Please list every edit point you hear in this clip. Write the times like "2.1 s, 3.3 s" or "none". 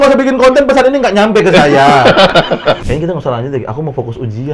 2.8 s